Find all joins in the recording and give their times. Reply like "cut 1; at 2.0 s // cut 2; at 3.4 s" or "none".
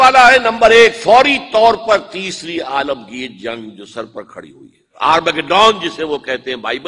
none